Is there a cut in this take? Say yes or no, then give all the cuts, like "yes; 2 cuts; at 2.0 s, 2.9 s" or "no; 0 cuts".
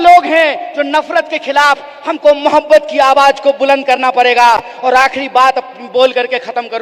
no; 0 cuts